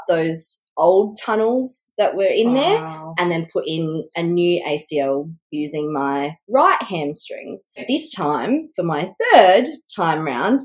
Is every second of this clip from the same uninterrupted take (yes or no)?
no